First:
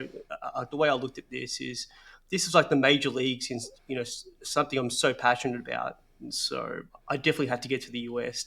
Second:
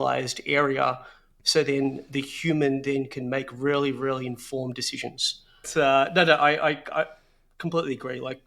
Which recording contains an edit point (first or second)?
second